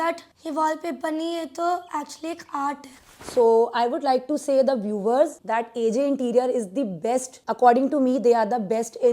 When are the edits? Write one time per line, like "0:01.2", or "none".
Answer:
0:03.1